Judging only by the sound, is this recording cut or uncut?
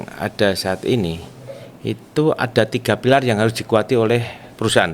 uncut